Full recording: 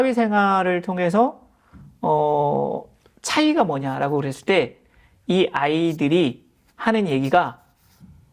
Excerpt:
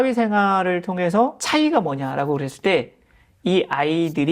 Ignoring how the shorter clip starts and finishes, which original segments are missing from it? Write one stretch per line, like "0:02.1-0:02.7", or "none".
0:01.4-0:03.2